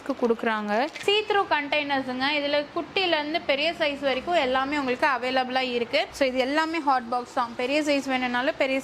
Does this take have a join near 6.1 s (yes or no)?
yes